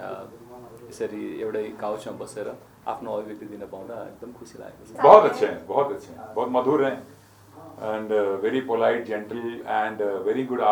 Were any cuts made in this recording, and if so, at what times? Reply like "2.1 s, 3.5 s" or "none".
4.9 s